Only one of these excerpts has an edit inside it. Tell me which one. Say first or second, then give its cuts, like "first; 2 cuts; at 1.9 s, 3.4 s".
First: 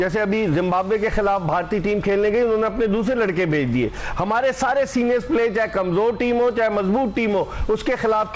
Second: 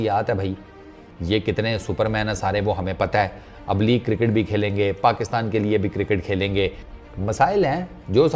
second; 2 cuts; at 1.2 s, 6.9 s